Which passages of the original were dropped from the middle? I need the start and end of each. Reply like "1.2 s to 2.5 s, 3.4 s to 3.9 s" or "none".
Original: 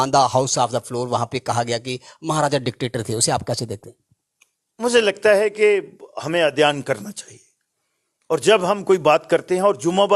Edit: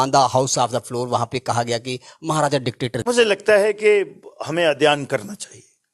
3.0 s to 4.8 s